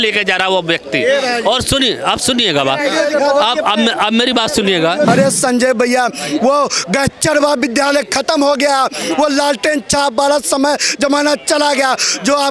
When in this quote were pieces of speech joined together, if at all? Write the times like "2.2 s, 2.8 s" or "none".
5.1 s